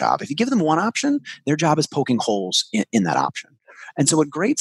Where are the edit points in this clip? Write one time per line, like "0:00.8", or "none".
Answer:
none